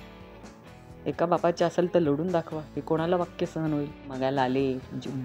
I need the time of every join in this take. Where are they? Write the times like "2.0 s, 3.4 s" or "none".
4.1 s